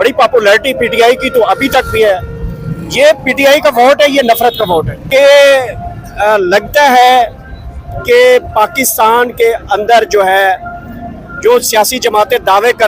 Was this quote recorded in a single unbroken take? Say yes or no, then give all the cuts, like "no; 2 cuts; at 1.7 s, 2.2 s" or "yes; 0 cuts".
no; 1 cut; at 5.0 s